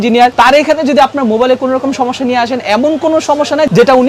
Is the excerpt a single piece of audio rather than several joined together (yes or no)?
yes